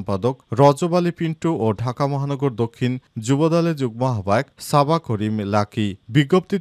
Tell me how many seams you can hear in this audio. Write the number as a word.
zero